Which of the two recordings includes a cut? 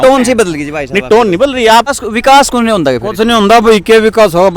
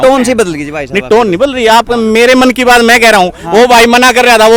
first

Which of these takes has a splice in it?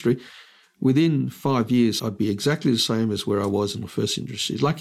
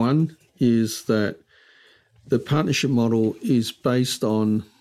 first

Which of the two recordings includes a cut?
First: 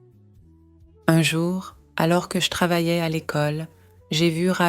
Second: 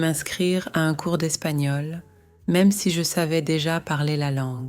first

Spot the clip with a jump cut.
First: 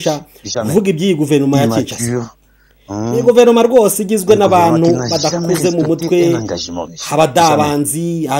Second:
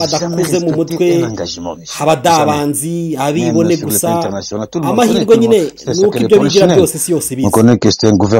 second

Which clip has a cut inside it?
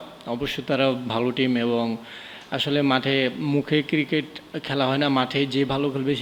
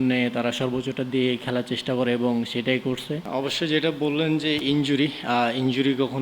second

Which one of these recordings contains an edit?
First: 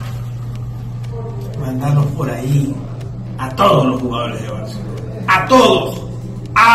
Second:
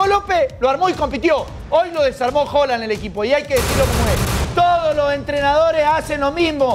second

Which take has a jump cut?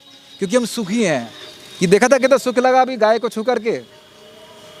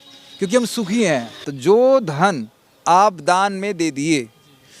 second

